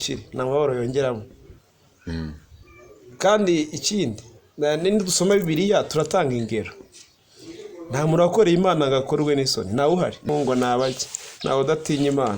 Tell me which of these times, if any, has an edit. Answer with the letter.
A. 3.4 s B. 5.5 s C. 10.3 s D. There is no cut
C